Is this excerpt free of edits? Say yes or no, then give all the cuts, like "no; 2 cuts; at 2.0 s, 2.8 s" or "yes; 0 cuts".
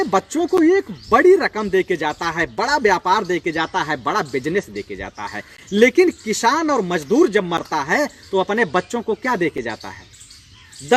yes; 0 cuts